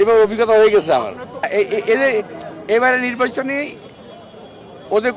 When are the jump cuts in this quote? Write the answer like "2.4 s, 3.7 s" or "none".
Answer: 1.5 s